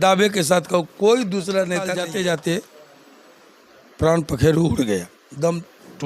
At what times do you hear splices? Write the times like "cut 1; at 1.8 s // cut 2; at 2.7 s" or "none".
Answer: cut 1; at 2.0 s